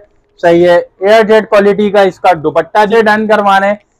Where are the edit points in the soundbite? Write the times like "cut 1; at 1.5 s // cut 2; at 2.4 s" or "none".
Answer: cut 1; at 2.9 s

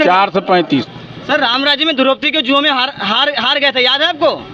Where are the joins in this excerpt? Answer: cut 1; at 1.0 s

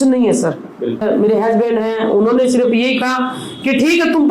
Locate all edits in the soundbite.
cut 1; at 1.0 s

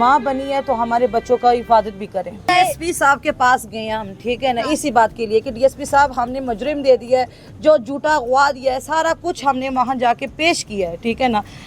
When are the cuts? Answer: cut 1; at 2.5 s

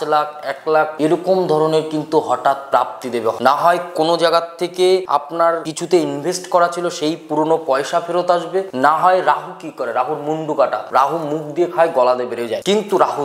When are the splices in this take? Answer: none

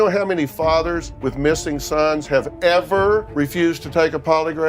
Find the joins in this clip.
cut 1; at 1.1 s // cut 2; at 3.3 s

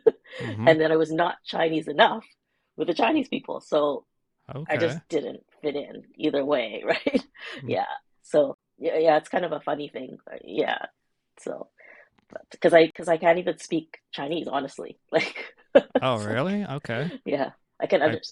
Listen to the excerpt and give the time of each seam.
none

